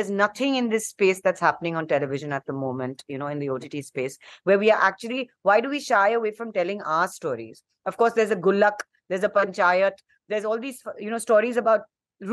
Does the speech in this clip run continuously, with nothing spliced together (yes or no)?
yes